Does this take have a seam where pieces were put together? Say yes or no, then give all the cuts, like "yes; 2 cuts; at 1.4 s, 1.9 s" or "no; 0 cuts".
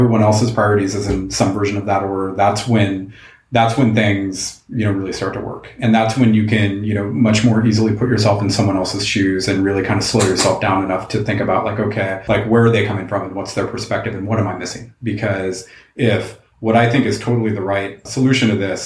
yes; 2 cuts; at 12.2 s, 18.0 s